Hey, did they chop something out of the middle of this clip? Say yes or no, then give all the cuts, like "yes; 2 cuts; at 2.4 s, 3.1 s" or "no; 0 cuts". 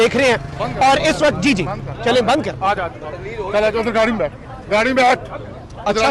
no; 0 cuts